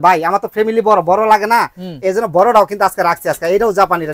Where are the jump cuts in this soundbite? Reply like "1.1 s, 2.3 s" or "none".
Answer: none

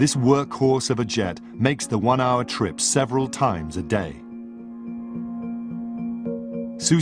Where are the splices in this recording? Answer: none

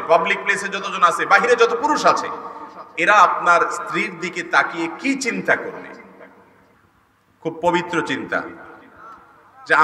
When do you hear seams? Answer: 6.8 s

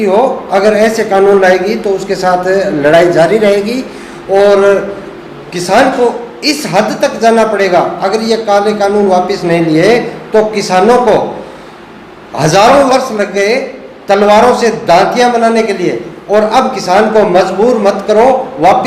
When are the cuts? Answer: none

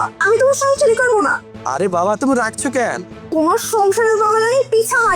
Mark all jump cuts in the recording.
none

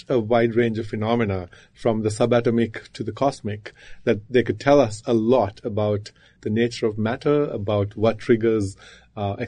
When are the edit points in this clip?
6.4 s

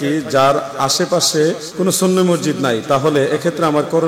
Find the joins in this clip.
1.7 s

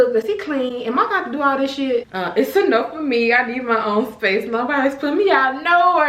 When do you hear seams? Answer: 2.1 s

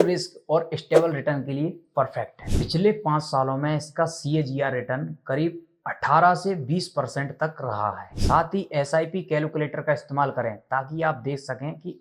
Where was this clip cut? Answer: 2.5 s, 8.1 s

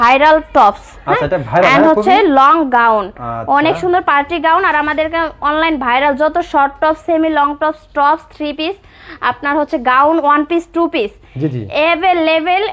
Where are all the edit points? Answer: none

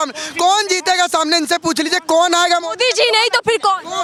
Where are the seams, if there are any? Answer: none

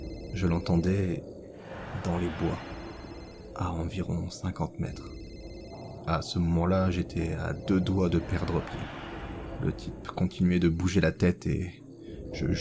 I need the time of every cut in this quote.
9.5 s

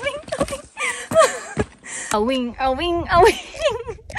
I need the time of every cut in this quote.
2.1 s

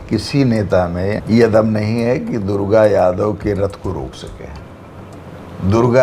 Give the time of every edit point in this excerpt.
1.2 s

